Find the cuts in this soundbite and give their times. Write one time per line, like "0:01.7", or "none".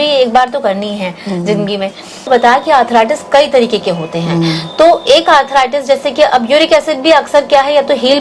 0:02.3